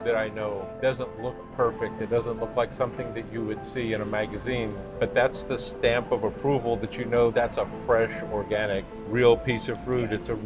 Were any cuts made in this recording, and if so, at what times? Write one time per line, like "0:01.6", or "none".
none